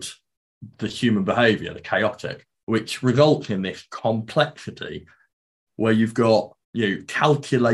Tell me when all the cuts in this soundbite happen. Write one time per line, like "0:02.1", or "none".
0:05.4
0:06.6